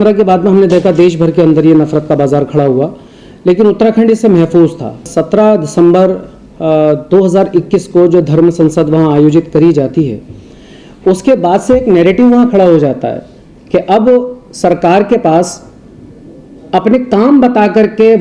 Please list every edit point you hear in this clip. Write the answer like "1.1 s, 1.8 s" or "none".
5.1 s